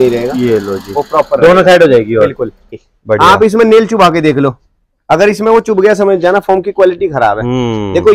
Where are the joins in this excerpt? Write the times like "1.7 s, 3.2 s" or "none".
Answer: 2.9 s